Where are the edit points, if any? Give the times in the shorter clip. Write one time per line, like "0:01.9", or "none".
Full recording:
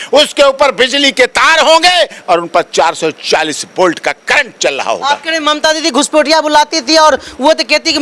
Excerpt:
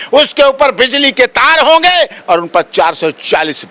none